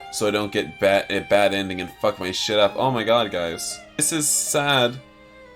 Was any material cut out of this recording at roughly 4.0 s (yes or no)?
yes